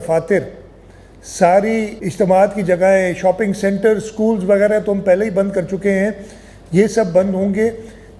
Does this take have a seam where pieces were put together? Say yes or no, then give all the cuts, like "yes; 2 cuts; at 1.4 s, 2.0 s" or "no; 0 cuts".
yes; 1 cut; at 2.0 s